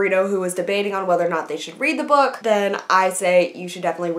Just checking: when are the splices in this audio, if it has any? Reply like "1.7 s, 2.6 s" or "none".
none